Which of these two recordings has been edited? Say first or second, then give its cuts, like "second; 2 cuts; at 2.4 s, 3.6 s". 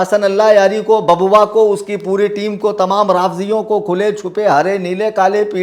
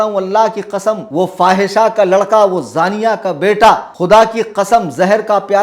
second; 2 cuts; at 1.0 s, 3.9 s